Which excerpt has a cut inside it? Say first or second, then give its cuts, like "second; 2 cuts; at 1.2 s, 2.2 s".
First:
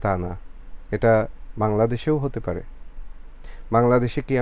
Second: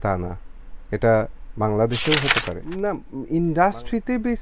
second; 1 cut; at 2.6 s